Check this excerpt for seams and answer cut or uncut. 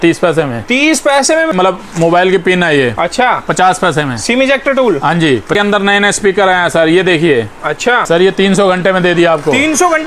cut